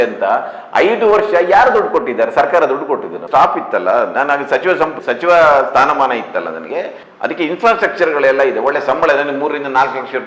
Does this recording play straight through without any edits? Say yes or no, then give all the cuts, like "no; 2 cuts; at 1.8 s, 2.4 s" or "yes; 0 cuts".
no; 2 cuts; at 3.2 s, 7.1 s